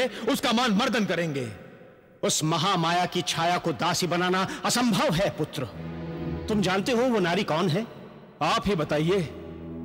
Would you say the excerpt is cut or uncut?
cut